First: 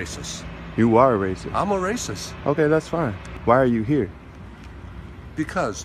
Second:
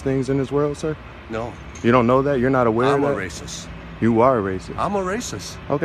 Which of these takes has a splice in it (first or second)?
first